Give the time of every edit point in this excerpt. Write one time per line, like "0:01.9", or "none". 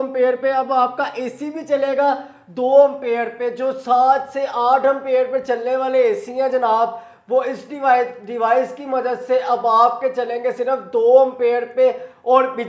none

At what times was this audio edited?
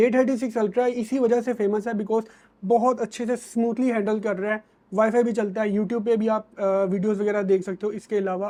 none

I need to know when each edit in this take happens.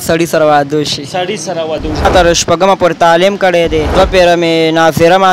0:02.1
0:03.9

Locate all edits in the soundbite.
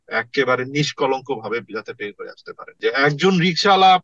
0:02.8

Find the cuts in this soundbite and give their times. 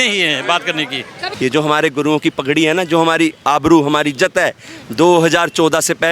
0:01.2

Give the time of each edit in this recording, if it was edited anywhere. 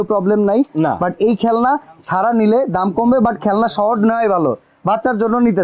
none

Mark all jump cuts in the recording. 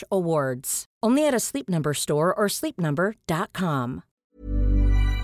0:04.1

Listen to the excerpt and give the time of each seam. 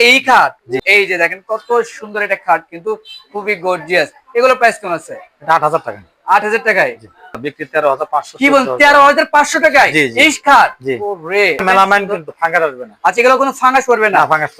0:00.8
0:07.4
0:11.6

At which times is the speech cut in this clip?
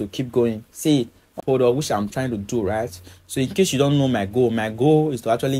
0:01.3

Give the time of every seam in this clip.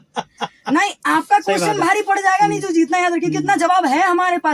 none

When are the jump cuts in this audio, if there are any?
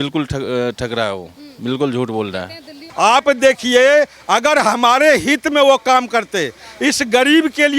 0:02.8

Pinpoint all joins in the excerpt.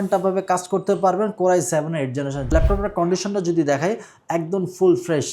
0:02.5

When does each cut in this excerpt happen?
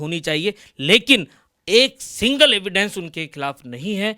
none

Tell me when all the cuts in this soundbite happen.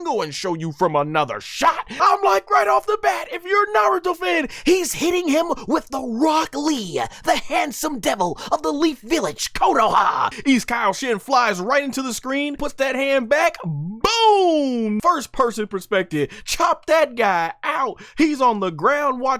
0:01.9
0:10.3
0:12.6
0:15.0

